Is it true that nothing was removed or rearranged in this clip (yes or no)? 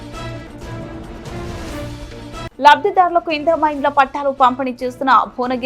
no